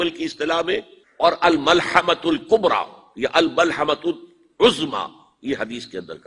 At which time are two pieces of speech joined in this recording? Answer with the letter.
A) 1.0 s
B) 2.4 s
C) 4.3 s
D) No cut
A